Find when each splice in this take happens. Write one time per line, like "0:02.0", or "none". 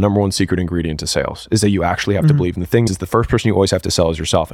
0:02.9